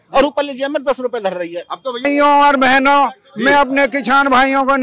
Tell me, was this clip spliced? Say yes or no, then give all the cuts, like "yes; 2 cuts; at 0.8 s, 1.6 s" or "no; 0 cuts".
yes; 1 cut; at 2.1 s